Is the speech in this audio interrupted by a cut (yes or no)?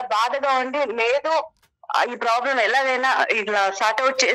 no